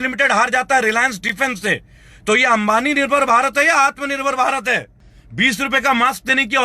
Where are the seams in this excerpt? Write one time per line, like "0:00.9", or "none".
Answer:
0:04.9

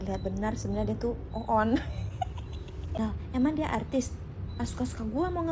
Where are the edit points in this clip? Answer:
0:03.0

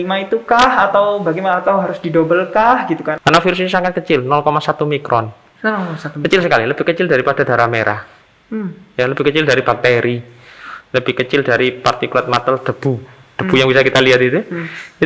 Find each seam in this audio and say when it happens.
0:03.1

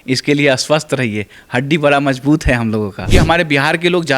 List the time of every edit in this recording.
0:03.1

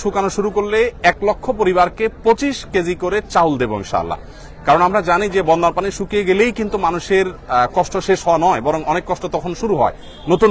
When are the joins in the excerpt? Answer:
none

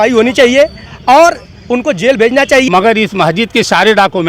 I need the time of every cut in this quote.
0:02.7

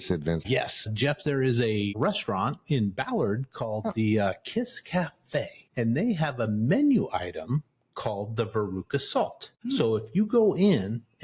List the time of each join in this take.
0:00.9
0:01.9
0:05.7
0:09.5

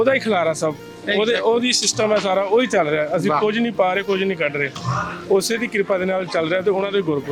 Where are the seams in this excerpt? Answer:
none

